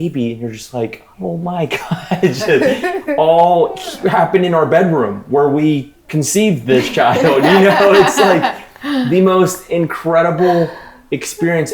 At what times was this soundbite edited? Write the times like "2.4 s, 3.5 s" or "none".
1.0 s, 6.0 s